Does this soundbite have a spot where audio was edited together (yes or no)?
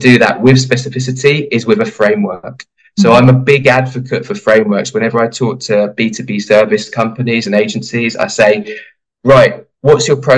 no